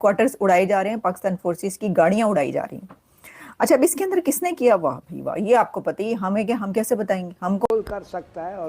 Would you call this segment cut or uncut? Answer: cut